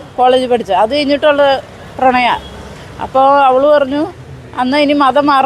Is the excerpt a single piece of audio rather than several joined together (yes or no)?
yes